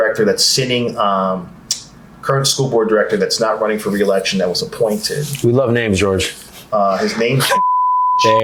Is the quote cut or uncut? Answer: uncut